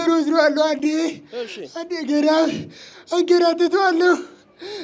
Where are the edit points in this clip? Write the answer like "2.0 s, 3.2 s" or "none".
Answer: none